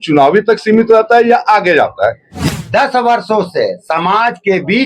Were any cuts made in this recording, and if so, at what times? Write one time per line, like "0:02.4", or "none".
0:02.4